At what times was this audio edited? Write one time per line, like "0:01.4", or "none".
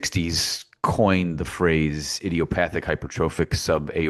none